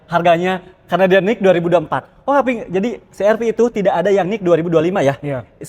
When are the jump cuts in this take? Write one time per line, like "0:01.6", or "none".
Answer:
none

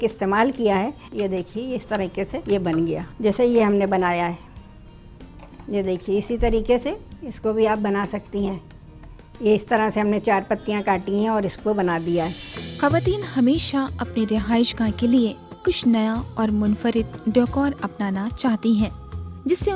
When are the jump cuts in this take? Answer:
0:01.0
0:02.4
0:03.1
0:12.6

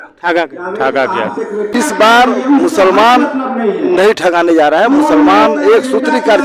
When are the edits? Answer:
0:01.7

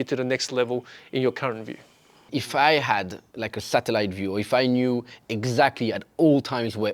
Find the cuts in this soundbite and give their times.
0:02.2

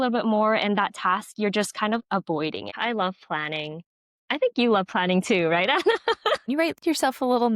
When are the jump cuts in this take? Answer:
0:02.7
0:06.5

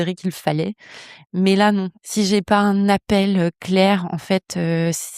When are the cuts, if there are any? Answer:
0:02.0

